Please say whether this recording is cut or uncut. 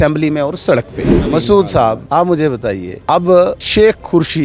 cut